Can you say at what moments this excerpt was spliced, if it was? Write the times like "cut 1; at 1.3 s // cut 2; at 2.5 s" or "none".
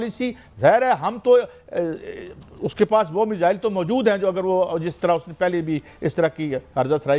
none